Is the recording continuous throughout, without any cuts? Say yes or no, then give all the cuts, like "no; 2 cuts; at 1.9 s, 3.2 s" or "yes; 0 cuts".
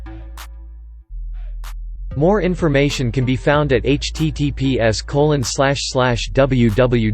no; 1 cut; at 2.2 s